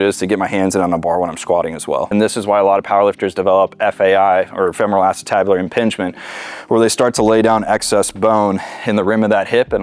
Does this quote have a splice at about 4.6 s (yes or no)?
no